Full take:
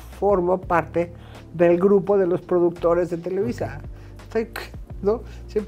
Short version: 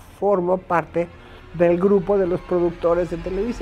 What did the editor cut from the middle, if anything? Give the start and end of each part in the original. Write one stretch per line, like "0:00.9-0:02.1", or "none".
none